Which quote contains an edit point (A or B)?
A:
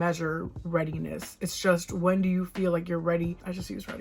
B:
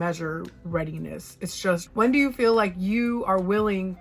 B